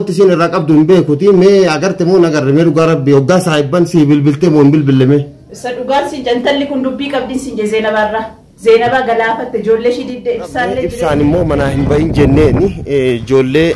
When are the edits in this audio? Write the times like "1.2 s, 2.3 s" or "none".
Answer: 10.9 s